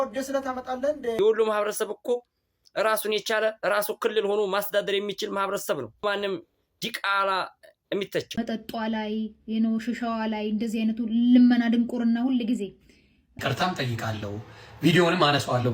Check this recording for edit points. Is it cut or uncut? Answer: cut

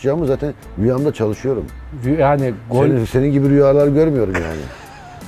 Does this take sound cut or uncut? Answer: uncut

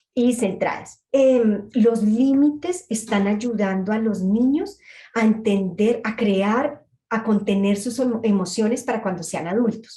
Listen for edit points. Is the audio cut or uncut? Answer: cut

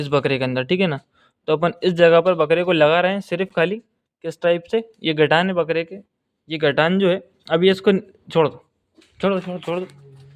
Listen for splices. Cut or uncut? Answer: uncut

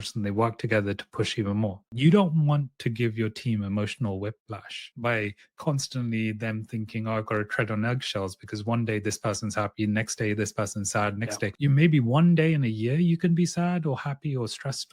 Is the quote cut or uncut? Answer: cut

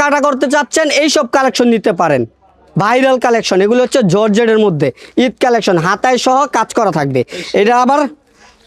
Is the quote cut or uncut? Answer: uncut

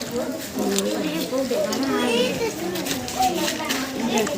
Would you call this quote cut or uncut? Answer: cut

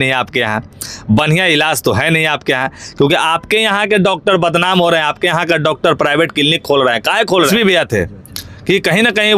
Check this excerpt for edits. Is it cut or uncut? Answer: cut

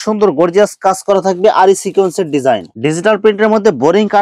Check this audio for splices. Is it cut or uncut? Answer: cut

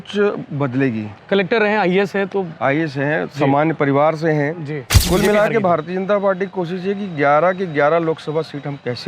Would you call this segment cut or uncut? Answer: cut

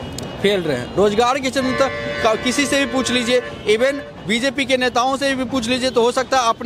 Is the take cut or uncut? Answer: uncut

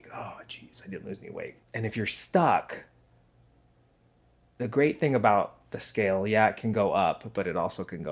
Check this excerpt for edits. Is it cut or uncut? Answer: uncut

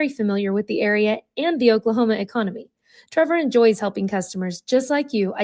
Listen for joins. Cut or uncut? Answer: uncut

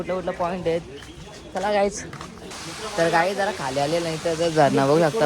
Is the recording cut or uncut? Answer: cut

